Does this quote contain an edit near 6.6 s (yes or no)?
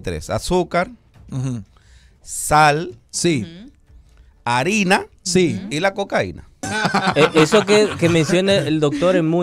yes